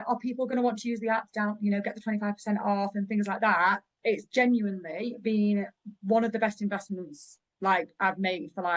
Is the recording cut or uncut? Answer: uncut